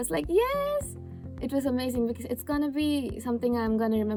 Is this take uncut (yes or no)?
yes